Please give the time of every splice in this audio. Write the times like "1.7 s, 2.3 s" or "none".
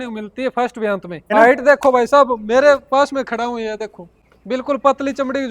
1.2 s, 4.2 s